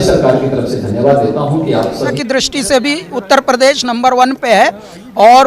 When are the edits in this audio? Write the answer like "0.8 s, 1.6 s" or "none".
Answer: 2.2 s